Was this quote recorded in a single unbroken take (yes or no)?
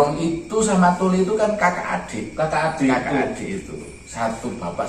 yes